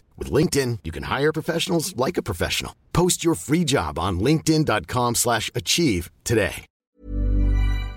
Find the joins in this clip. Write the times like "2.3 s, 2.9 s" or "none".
7.0 s